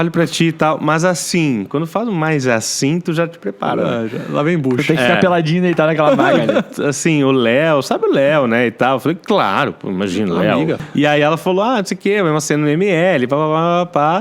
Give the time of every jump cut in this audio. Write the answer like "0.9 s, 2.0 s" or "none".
10.8 s